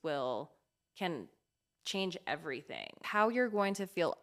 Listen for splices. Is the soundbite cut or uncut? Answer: cut